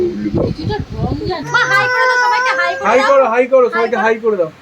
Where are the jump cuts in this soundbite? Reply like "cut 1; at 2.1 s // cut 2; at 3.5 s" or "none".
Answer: cut 1; at 1.4 s